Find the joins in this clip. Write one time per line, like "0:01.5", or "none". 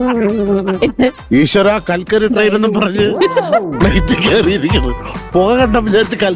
none